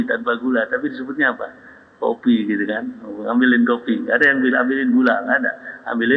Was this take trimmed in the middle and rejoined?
no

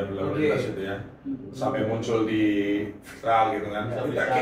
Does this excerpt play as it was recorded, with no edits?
yes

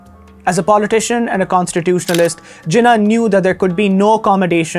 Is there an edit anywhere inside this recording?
no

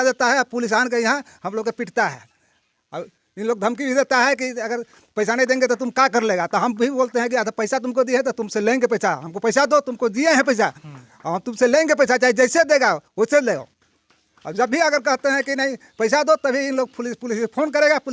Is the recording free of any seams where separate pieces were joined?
yes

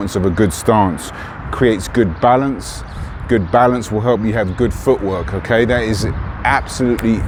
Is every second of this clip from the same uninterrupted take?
yes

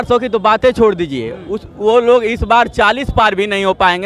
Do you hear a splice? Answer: no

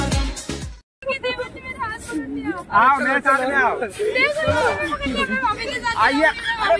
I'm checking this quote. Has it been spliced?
no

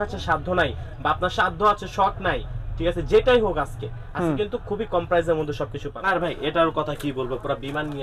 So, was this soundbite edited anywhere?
yes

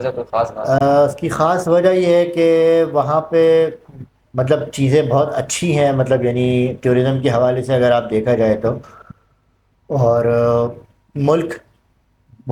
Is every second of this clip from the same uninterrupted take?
yes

